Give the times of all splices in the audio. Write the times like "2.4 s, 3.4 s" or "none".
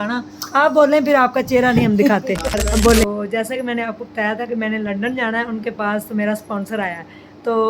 3.0 s